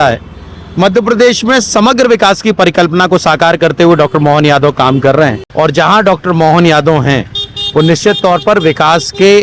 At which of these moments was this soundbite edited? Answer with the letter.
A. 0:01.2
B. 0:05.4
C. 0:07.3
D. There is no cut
B